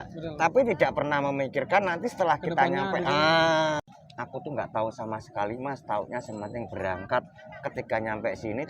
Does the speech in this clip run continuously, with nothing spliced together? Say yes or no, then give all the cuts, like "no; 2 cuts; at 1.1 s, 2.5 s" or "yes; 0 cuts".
no; 1 cut; at 3.8 s